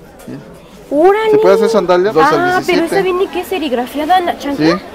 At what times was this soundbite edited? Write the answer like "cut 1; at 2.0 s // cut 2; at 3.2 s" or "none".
cut 1; at 2.1 s